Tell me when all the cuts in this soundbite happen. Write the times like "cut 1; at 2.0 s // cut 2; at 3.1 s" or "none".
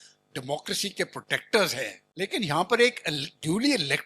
cut 1; at 2.0 s